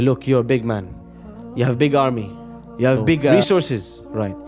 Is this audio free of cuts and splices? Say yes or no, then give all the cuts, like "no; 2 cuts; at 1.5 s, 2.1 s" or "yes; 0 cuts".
no; 1 cut; at 3.3 s